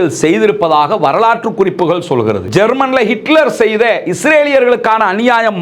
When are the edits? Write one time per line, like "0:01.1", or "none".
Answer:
0:02.4